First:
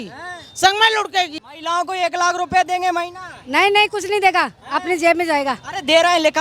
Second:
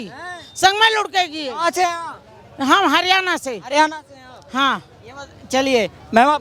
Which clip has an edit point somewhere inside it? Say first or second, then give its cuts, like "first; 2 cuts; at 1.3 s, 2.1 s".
first; 1 cut; at 1.4 s